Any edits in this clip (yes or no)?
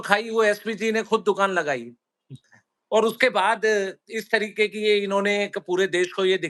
no